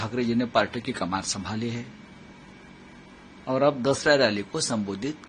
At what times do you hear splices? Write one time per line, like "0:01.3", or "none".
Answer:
none